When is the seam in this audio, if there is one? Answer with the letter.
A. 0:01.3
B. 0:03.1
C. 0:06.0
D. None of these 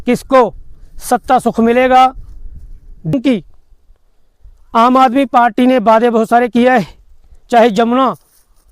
B